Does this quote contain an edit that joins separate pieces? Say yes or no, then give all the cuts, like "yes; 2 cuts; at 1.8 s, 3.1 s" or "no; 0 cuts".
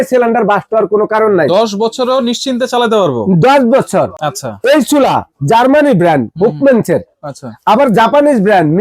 no; 0 cuts